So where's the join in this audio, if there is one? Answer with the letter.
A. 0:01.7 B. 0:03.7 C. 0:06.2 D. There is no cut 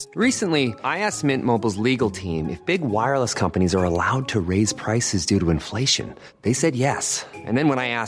D